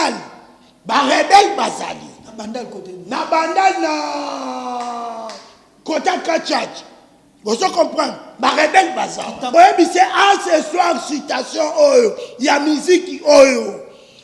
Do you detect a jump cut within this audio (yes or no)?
yes